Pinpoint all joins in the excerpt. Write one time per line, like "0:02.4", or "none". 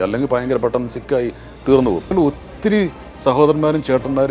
0:02.1